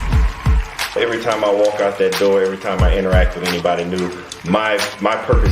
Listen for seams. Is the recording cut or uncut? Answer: cut